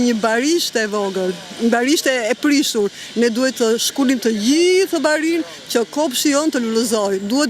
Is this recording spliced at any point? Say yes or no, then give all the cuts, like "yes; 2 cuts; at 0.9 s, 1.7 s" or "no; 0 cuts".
no; 0 cuts